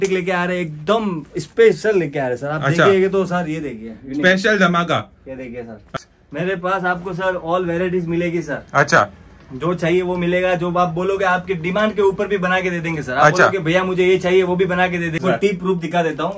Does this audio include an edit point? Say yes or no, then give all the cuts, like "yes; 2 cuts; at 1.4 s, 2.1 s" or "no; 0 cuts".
yes; 2 cuts; at 5.9 s, 15.2 s